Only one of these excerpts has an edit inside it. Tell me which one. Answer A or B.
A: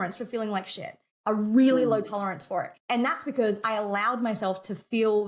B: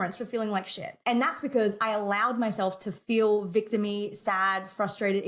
B